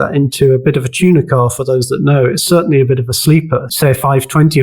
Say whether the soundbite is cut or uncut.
cut